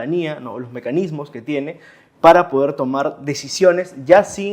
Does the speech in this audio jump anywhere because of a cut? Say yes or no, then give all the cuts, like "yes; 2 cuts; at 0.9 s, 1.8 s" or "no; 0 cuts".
no; 0 cuts